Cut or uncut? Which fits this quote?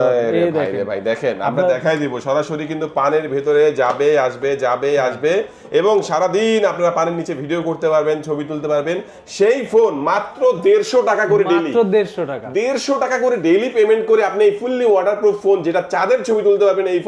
uncut